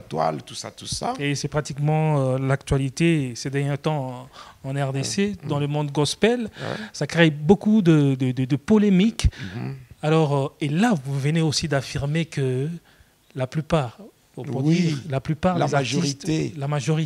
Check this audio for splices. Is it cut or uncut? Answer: uncut